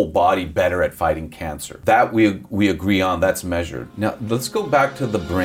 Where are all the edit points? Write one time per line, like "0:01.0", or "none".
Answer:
0:01.8
0:03.8

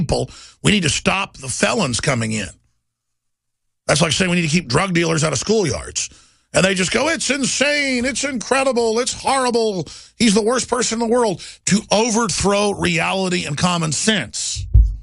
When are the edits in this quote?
none

